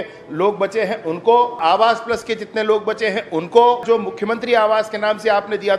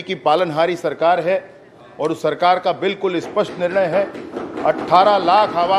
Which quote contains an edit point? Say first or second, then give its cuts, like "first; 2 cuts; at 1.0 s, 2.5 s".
first; 2 cuts; at 1.6 s, 3.8 s